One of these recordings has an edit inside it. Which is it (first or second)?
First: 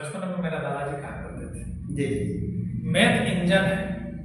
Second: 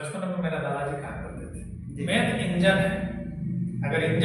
second